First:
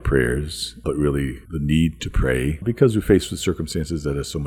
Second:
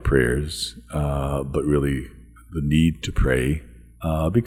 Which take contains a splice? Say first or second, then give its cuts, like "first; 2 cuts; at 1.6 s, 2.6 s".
first; 3 cuts; at 0.8 s, 1.4 s, 2.6 s